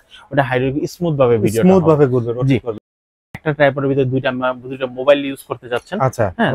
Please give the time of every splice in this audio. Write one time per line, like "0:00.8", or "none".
0:02.9